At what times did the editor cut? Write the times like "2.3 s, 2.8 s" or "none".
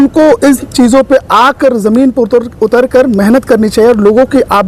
none